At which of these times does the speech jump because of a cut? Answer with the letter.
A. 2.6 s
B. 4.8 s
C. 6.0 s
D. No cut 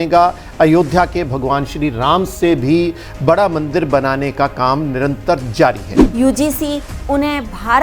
C